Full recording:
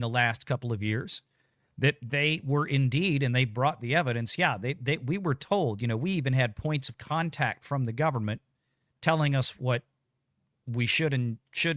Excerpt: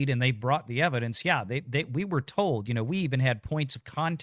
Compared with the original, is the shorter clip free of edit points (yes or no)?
yes